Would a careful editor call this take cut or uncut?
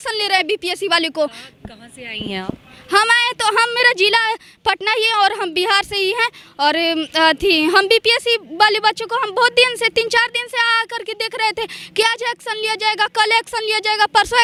uncut